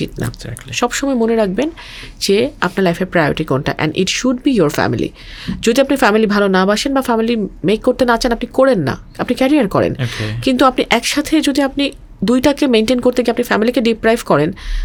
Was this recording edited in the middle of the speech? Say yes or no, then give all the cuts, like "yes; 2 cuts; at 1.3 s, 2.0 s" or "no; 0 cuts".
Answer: no; 0 cuts